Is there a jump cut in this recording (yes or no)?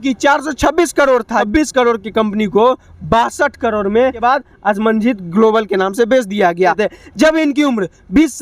yes